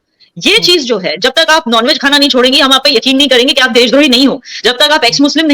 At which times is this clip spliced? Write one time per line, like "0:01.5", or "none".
none